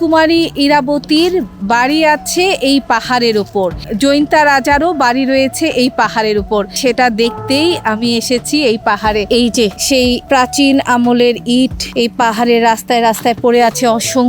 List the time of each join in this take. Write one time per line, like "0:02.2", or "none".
0:03.9
0:09.3
0:11.8